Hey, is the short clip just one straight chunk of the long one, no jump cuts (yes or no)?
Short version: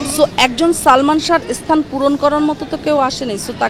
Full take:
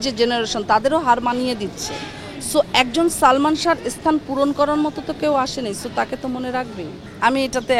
yes